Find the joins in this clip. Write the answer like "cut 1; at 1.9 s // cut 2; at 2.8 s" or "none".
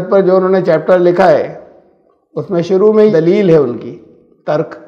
cut 1; at 3.1 s